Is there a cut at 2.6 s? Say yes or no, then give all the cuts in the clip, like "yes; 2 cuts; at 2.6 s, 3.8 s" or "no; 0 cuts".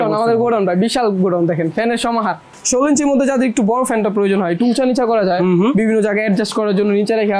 yes; 1 cut; at 2.6 s